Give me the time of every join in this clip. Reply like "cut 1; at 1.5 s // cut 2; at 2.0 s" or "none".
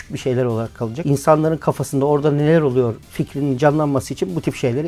none